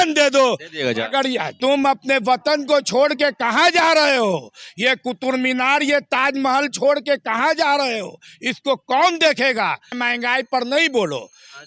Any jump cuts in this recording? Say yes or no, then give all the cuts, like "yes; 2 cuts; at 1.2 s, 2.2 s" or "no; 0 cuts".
yes; 2 cuts; at 1.6 s, 10.0 s